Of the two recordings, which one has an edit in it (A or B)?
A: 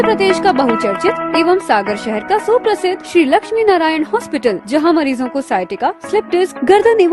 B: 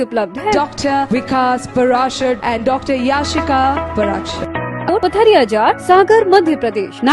B